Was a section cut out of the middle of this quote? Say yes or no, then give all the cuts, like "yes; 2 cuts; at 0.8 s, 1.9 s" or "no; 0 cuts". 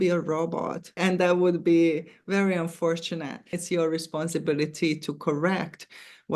yes; 2 cuts; at 1.0 s, 3.6 s